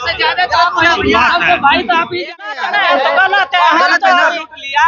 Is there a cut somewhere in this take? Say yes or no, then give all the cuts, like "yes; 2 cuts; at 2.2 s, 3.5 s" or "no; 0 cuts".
yes; 1 cut; at 2.4 s